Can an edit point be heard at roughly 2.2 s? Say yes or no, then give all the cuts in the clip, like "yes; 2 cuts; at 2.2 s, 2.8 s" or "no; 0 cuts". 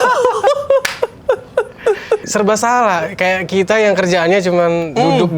yes; 1 cut; at 2.2 s